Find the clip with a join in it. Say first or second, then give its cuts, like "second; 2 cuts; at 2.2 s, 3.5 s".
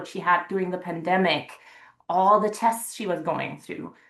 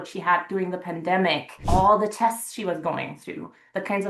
second; 1 cut; at 1.5 s